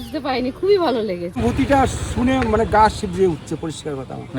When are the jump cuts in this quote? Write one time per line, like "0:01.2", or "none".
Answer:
0:01.4

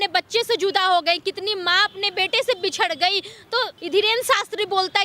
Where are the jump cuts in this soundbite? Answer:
0:03.8

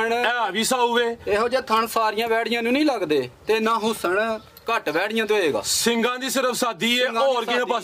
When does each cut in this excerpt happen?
none

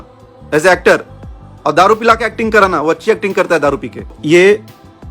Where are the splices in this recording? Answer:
0:04.2

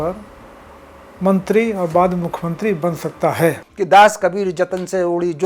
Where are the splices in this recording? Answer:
0:03.7

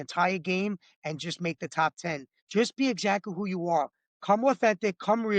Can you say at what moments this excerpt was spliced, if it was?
0:02.3

